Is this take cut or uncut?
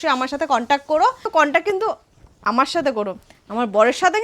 cut